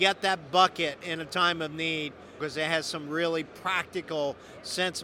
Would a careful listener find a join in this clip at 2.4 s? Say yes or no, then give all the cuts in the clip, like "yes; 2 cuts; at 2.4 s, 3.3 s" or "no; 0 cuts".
yes; 1 cut; at 2.4 s